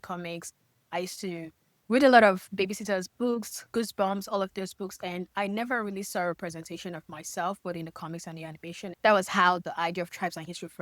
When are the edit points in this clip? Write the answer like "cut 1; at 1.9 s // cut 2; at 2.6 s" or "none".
none

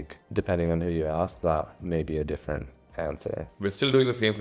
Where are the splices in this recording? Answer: cut 1; at 3.5 s

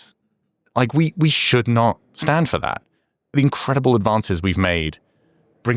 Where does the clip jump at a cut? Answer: cut 1; at 2.9 s

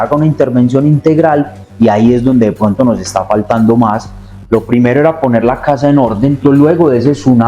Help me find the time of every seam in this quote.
cut 1; at 4.3 s // cut 2; at 6.4 s

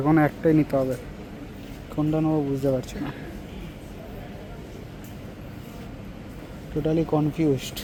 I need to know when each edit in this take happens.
none

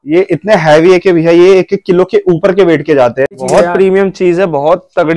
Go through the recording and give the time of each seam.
cut 1; at 3.4 s

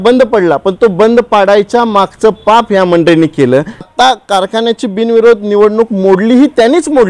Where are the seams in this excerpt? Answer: cut 1; at 3.9 s

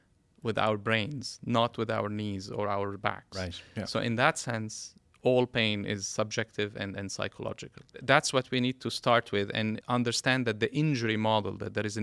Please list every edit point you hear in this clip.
cut 1; at 8.0 s // cut 2; at 9.8 s

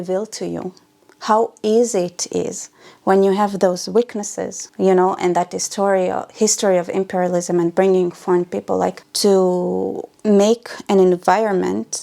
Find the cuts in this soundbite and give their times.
cut 1; at 9.0 s // cut 2; at 10.1 s

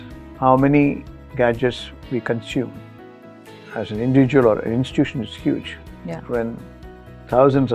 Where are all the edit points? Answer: none

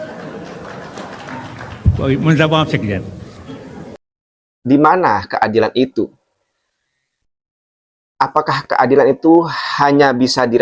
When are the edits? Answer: cut 1; at 4.0 s

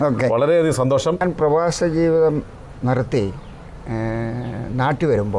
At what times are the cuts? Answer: cut 1; at 1.2 s

